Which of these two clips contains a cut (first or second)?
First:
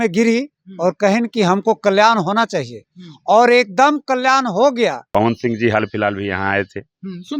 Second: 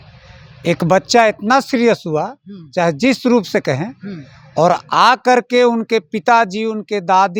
first